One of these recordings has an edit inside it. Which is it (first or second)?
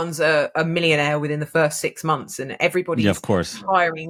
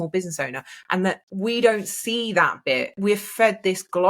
second